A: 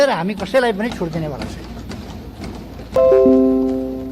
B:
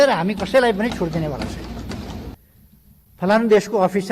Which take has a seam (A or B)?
B